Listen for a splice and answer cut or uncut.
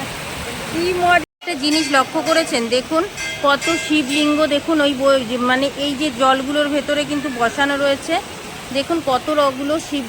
cut